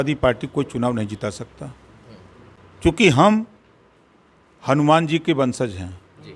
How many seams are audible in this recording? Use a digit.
0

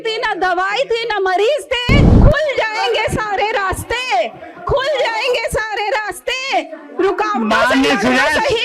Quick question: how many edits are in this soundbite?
1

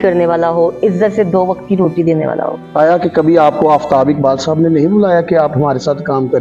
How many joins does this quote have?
1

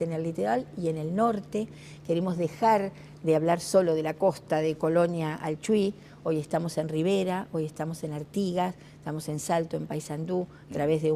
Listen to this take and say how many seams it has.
1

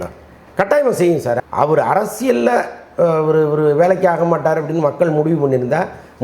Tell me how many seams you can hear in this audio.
1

